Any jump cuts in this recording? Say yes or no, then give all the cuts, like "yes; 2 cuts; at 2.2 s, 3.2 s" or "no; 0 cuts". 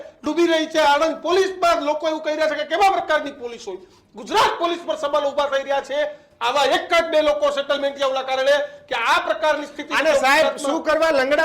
no; 0 cuts